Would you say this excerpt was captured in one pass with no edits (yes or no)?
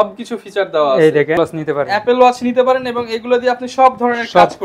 no